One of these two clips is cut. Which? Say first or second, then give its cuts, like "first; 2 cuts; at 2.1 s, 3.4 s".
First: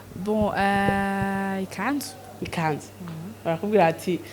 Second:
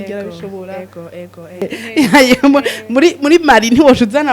second; 1 cut; at 1.8 s